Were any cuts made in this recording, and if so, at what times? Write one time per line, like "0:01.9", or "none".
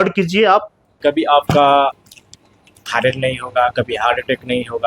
0:00.9